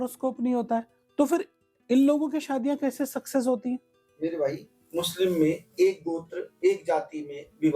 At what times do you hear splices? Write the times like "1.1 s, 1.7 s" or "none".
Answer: none

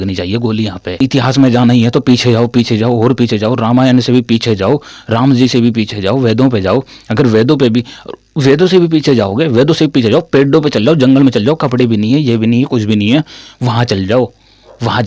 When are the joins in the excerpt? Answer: 1.0 s

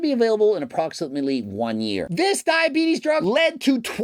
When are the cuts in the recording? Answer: 2.1 s, 3.2 s

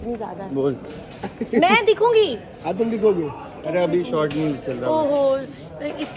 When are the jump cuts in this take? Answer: none

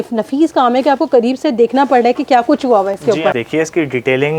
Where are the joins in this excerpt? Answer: 3.4 s

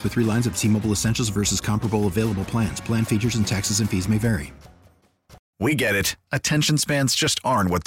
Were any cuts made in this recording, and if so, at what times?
5.4 s

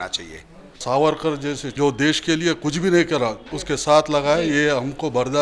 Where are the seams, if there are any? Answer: 0.8 s, 1.7 s, 3.5 s

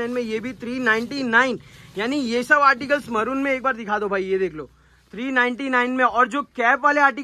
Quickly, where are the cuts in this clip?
none

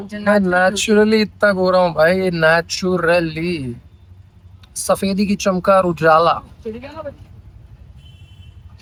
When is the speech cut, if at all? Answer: none

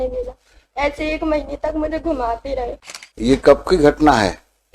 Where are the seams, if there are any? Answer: 2.8 s

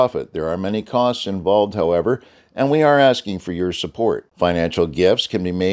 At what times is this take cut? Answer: none

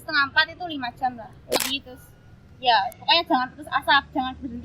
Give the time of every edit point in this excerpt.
1.6 s

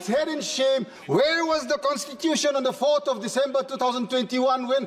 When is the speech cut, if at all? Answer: 0.9 s

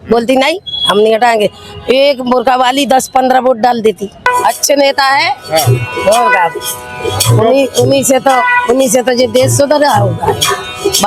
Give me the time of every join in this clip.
4.3 s

